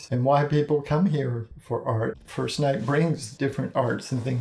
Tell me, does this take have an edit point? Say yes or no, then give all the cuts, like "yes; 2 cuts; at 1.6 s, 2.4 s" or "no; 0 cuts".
yes; 2 cuts; at 2.2 s, 3.3 s